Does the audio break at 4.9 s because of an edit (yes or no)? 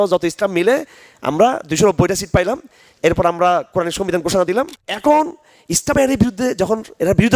yes